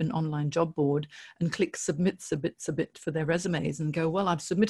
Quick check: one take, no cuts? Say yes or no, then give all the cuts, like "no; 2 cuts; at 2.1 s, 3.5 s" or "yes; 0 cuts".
yes; 0 cuts